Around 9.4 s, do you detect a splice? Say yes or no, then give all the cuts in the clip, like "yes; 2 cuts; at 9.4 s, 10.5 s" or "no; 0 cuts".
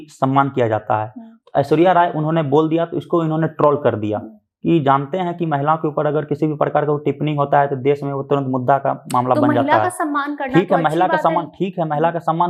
no; 0 cuts